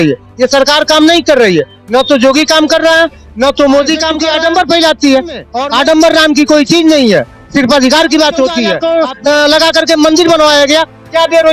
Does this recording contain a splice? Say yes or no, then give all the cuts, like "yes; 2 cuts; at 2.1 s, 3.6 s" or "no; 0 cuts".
yes; 3 cuts; at 4.2 s, 5.5 s, 8.8 s